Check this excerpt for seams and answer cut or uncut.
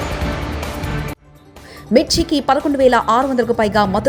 uncut